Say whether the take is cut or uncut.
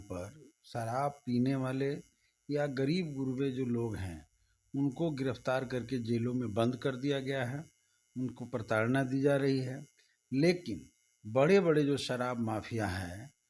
uncut